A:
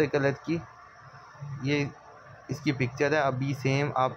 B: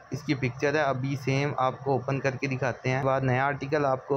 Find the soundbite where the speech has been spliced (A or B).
B